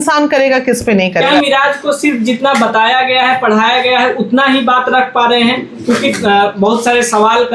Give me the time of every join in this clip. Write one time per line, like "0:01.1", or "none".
0:01.4